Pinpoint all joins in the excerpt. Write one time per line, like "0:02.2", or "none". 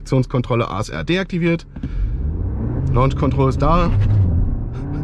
none